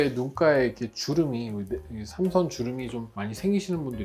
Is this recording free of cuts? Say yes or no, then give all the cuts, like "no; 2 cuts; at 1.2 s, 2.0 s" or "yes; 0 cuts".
yes; 0 cuts